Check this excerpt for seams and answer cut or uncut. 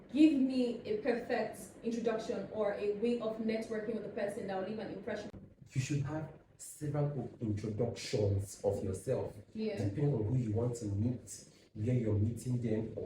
cut